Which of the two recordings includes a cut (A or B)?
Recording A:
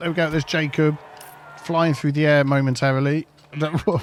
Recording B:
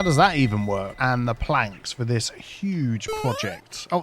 B